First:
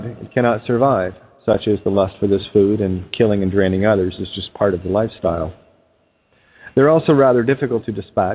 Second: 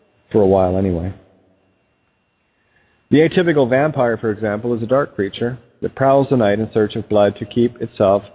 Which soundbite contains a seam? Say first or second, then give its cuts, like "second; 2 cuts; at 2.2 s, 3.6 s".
first; 1 cut; at 1.9 s